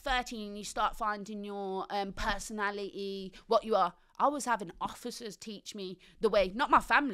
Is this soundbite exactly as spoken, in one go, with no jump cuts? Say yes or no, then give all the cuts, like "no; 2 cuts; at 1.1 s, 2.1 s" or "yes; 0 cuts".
yes; 0 cuts